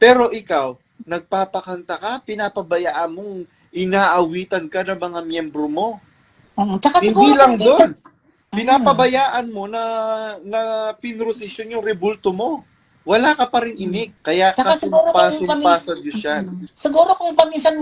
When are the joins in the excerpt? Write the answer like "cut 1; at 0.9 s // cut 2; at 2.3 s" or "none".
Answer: none